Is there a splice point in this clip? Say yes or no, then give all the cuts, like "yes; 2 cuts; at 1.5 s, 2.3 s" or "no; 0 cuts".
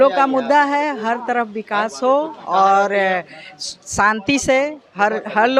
no; 0 cuts